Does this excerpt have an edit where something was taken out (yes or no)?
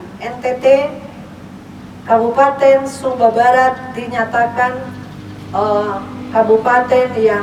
no